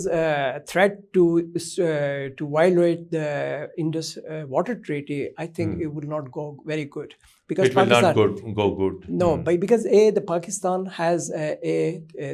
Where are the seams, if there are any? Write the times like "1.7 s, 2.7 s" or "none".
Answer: none